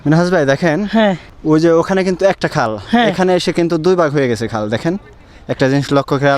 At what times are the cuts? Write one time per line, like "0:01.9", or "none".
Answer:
0:01.3